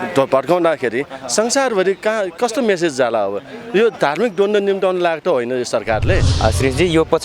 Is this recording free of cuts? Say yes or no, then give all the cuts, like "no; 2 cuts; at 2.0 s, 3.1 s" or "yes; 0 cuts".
no; 1 cut; at 6.3 s